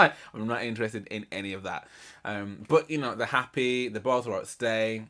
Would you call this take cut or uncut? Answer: uncut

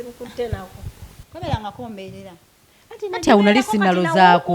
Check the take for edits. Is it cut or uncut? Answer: cut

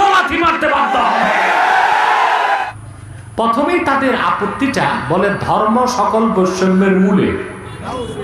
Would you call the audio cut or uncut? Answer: cut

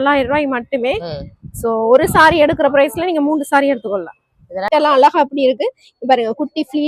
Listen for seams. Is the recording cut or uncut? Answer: cut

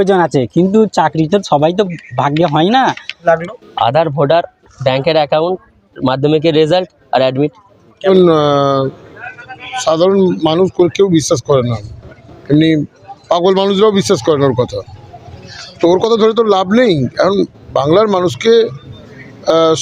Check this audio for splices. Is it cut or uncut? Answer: cut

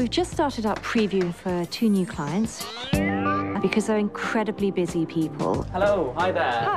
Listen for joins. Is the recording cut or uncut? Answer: uncut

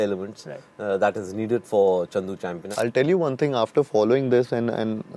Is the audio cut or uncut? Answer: cut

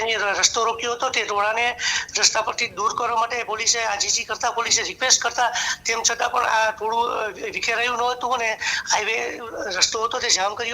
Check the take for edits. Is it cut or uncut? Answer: uncut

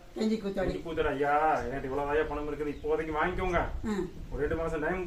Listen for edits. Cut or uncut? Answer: uncut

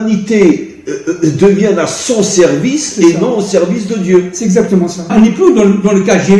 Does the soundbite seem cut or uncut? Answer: cut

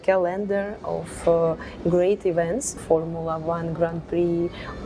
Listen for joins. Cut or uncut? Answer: cut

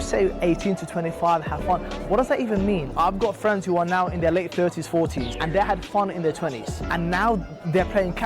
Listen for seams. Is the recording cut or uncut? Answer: cut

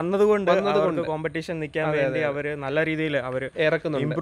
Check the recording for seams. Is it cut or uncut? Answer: uncut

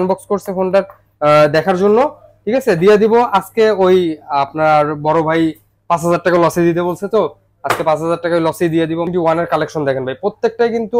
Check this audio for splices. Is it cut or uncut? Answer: cut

